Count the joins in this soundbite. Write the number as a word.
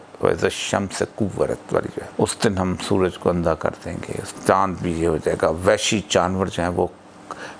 two